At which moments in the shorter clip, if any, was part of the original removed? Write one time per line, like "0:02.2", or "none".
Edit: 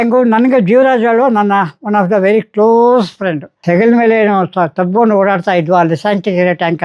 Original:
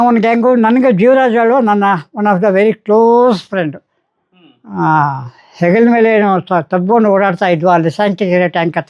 0:03.5